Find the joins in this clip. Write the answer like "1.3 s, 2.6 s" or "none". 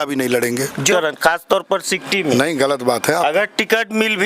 0.9 s